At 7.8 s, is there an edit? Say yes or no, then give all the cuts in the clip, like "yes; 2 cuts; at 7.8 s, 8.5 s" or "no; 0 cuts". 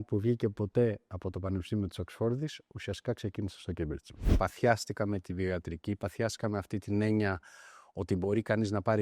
no; 1 cut; at 4.3 s